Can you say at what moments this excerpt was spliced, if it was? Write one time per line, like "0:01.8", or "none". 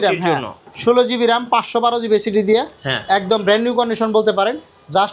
none